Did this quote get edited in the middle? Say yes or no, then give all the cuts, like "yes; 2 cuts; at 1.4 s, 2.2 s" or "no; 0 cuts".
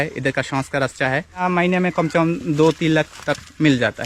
yes; 1 cut; at 1.4 s